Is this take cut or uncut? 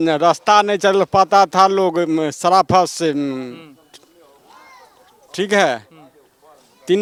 uncut